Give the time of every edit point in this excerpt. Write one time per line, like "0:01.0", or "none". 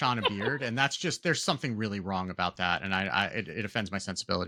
none